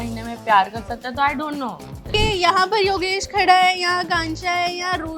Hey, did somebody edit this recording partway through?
yes; 1 cut; at 2.1 s

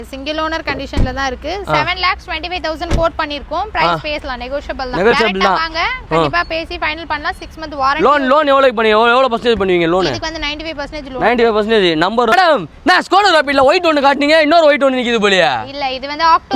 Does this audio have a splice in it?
yes; 1 cut; at 12.3 s

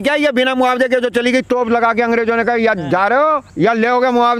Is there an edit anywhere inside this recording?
yes; 1 cut; at 3.5 s

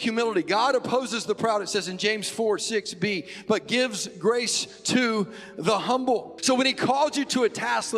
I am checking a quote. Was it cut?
yes; 1 cut; at 6.3 s

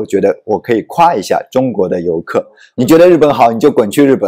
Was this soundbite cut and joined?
yes; 1 cut; at 2.6 s

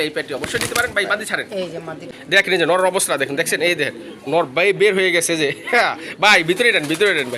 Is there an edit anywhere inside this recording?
yes; 1 cut; at 2.1 s

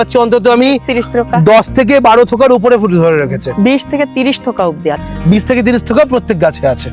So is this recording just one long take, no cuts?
yes; 0 cuts

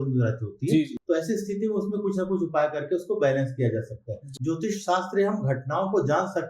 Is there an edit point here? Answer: yes; 2 cuts; at 1.0 s, 4.3 s

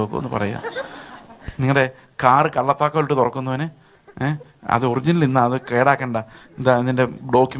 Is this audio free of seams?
yes; 0 cuts

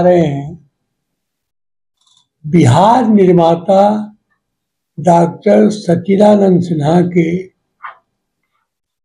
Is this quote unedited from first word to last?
yes; 0 cuts

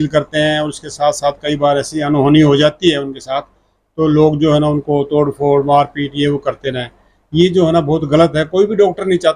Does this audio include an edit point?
no; 0 cuts

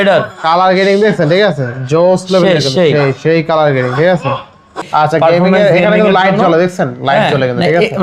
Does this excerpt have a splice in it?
yes; 1 cut; at 4.8 s

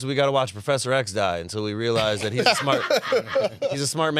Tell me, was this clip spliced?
no; 0 cuts

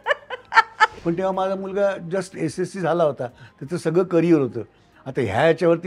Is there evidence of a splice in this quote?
yes; 1 cut; at 1.0 s

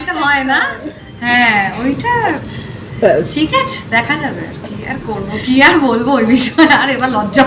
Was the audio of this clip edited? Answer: no; 0 cuts

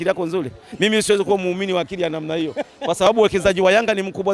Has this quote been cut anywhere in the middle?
no; 0 cuts

